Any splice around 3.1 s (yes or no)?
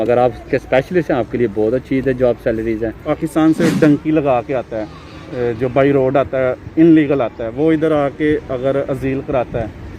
yes